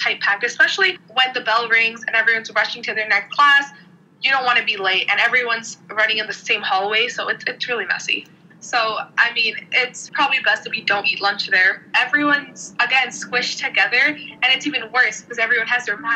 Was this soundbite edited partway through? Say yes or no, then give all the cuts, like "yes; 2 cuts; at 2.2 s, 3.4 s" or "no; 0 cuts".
yes; 3 cuts; at 8.4 s, 10.0 s, 11.9 s